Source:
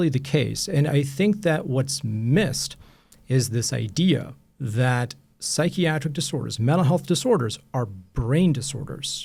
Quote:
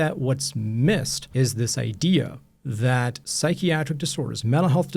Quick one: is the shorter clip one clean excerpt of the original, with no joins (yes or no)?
no